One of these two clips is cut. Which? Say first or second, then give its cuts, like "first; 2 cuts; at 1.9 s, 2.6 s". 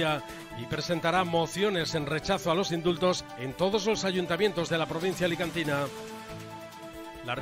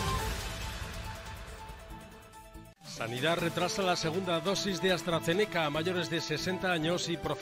second; 1 cut; at 2.7 s